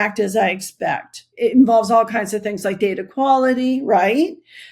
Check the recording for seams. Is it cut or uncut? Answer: cut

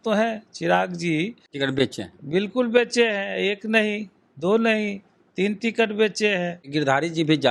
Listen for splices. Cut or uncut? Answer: cut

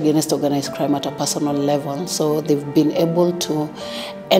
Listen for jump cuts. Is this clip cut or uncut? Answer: uncut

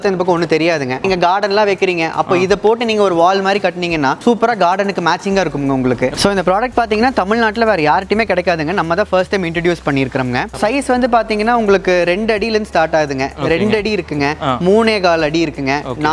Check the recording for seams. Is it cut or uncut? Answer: cut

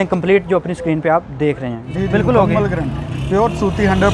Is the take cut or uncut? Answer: cut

